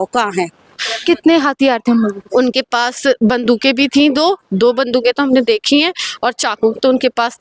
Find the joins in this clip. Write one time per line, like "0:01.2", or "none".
0:00.9